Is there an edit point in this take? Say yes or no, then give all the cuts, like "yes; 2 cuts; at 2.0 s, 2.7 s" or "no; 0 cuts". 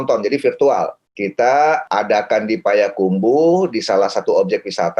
yes; 2 cuts; at 1.0 s, 1.8 s